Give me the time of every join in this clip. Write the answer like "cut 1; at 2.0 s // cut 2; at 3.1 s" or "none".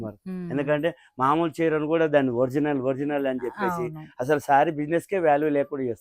none